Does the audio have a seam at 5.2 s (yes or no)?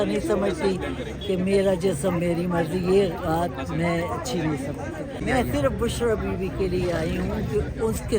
yes